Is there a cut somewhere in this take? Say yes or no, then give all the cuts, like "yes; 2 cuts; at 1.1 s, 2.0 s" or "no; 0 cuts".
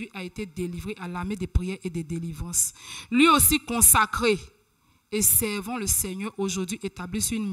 no; 0 cuts